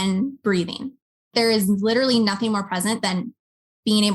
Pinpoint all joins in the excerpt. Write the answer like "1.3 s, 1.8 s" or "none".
1.3 s